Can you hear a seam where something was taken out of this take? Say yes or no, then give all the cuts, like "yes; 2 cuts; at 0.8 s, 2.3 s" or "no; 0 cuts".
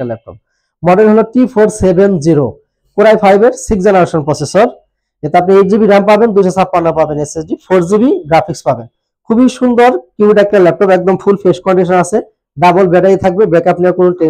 no; 0 cuts